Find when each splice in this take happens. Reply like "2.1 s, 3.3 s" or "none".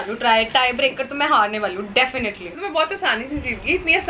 2.6 s